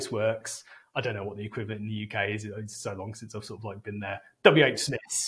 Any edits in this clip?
no; 0 cuts

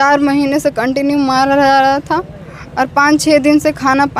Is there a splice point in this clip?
no; 0 cuts

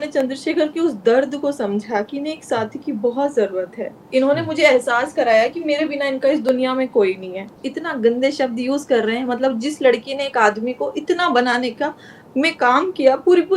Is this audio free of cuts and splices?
no; 1 cut; at 7.5 s

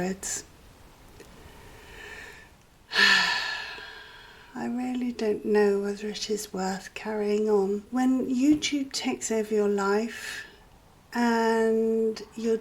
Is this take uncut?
no; 1 cut; at 7.8 s

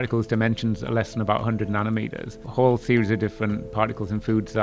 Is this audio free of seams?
no; 1 cut; at 2.4 s

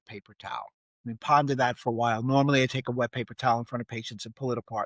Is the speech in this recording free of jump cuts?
yes; 0 cuts

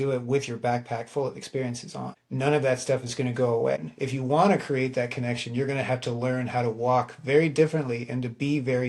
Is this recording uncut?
no; 2 cuts; at 2.2 s, 3.9 s

